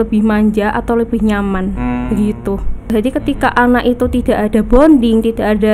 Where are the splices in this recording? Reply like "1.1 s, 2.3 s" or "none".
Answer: 2.9 s

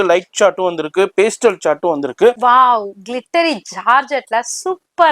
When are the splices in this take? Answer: 2.4 s

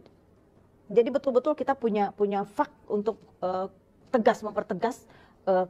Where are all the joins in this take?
none

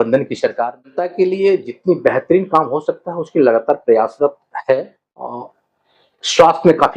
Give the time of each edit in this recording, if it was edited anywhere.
0.9 s, 5.3 s

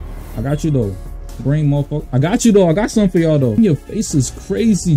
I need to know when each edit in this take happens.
2.0 s, 3.6 s

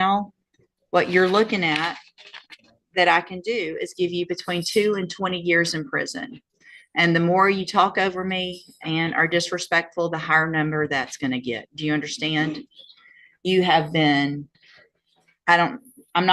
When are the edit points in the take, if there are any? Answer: 11.0 s

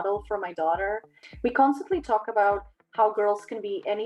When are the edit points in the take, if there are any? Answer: 1.2 s

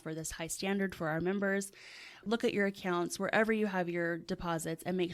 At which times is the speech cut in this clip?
2.2 s

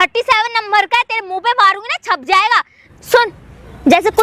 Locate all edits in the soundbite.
2.9 s

